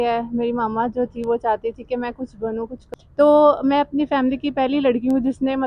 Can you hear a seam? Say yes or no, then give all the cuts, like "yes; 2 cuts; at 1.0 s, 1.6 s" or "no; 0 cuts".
yes; 1 cut; at 2.8 s